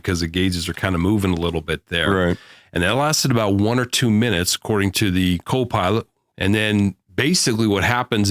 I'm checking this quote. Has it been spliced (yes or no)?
yes